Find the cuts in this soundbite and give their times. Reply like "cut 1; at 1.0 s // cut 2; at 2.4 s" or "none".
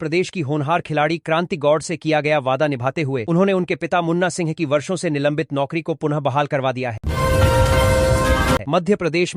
cut 1; at 7.0 s // cut 2; at 8.6 s